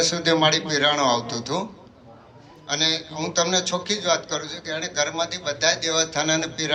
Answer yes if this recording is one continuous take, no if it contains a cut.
yes